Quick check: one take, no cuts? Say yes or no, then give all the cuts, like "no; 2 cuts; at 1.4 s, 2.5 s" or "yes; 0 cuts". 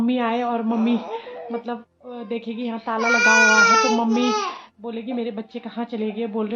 yes; 0 cuts